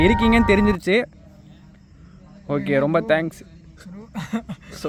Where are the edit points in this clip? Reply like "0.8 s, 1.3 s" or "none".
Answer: none